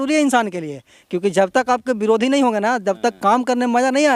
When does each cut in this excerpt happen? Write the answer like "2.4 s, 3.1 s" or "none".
none